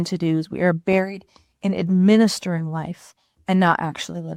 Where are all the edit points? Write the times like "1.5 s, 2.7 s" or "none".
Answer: none

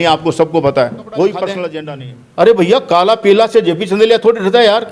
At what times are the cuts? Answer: 1.8 s

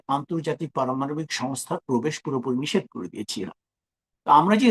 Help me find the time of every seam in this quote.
none

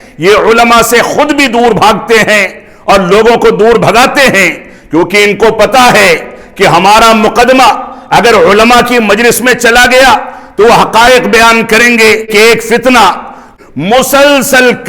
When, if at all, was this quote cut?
12.3 s, 13.4 s

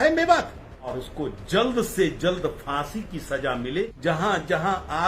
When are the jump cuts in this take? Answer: 0.9 s, 3.9 s

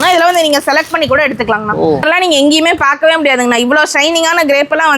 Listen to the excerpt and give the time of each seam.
2.0 s

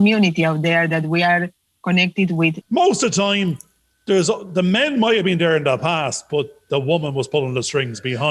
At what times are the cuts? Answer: 2.6 s

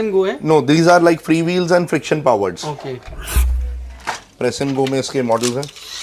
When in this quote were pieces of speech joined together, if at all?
3.5 s

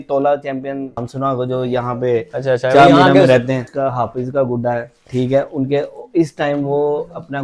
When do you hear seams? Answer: 1.1 s, 3.7 s

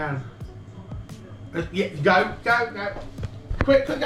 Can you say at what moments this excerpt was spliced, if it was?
none

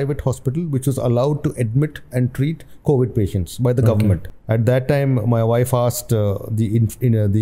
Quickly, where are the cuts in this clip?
4.3 s

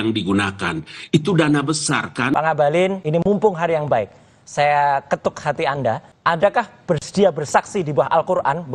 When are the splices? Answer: 2.3 s, 3.0 s, 6.1 s

